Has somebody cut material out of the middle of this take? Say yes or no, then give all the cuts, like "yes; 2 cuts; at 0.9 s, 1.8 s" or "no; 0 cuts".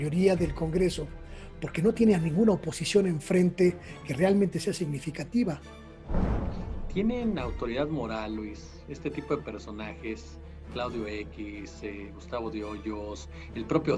no; 0 cuts